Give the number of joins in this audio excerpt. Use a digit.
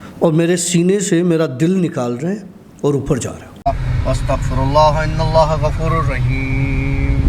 1